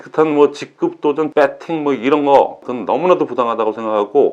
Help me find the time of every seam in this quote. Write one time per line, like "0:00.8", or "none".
0:01.3
0:02.7